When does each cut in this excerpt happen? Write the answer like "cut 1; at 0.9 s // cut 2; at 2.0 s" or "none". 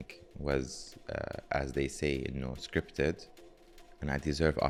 none